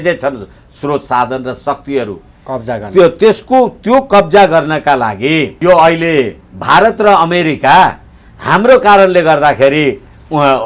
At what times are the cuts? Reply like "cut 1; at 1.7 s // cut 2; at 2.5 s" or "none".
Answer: cut 1; at 5.5 s